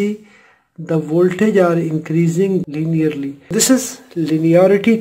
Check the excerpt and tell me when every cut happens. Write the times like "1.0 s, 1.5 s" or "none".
3.4 s